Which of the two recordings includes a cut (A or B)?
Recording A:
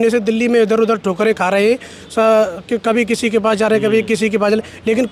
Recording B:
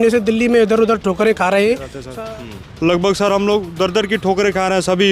B